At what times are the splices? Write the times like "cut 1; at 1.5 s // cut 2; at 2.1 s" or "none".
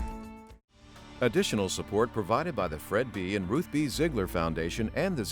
cut 1; at 1.0 s